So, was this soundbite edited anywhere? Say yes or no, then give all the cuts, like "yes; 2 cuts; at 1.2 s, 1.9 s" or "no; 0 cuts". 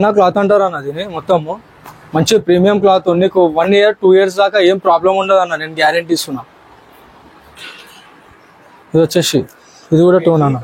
yes; 1 cut; at 7.6 s